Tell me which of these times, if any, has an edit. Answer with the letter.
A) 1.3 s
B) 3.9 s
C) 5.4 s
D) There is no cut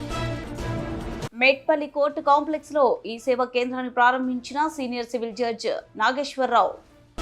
A